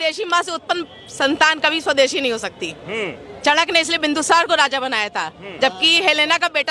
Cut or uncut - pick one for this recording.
uncut